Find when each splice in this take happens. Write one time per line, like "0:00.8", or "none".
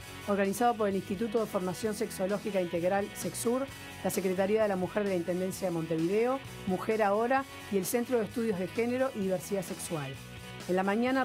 0:05.6